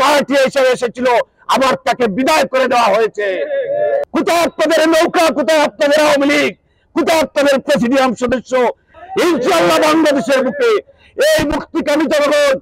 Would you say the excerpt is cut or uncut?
cut